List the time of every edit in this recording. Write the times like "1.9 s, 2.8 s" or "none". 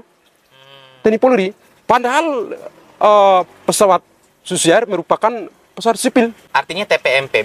6.4 s